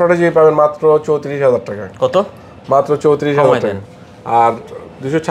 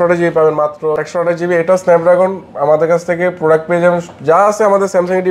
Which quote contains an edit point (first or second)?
second